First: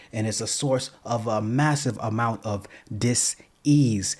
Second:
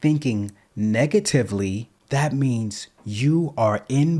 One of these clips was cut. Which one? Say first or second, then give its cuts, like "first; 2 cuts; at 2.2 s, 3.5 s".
second; 1 cut; at 1.9 s